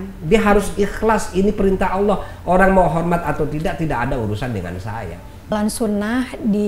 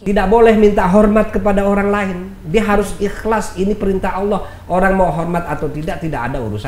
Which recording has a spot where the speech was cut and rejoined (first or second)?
first